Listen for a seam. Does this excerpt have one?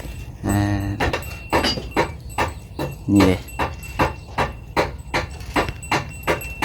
no; 0 cuts

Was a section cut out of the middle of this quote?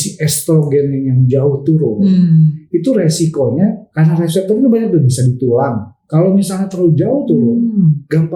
no; 0 cuts

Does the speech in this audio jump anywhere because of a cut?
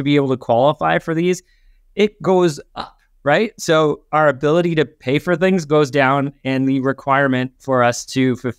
no; 0 cuts

